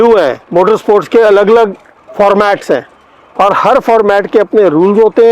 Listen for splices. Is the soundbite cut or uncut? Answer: uncut